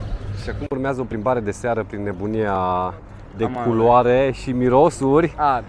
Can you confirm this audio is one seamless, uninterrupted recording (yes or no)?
yes